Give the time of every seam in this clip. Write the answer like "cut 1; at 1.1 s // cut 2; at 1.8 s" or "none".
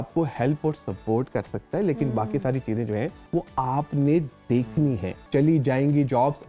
cut 1; at 3.2 s // cut 2; at 5.2 s